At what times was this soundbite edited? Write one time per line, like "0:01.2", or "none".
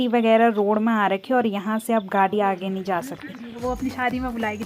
0:03.6

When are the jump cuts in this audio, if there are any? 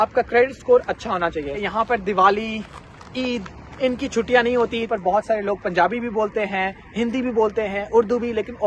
0:01.5
0:04.9

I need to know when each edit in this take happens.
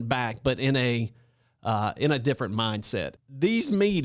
0:03.1

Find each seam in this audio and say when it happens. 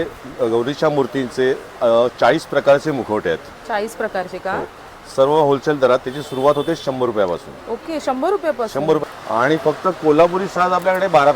0:09.0

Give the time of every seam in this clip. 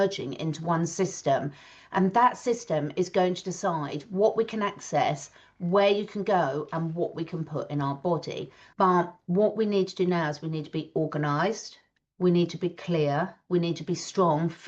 0:08.6

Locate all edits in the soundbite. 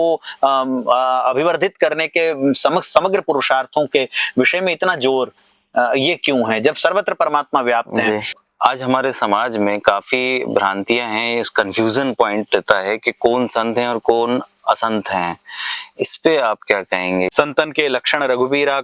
0:08.4
0:17.3

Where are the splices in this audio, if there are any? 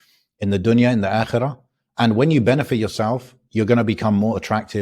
none

